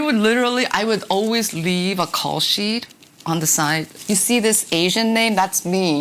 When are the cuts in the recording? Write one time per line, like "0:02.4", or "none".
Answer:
0:04.0